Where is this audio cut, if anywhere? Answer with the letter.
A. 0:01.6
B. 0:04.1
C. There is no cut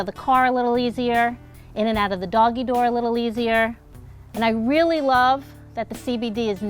B